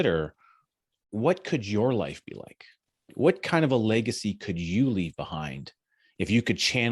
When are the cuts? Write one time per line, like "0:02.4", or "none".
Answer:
0:01.0
0:03.1